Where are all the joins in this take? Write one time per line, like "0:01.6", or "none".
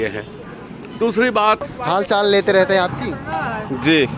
0:01.7

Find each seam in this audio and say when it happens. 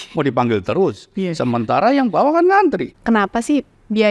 0:02.9

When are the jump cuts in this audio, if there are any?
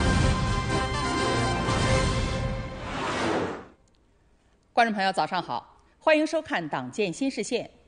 0:03.9

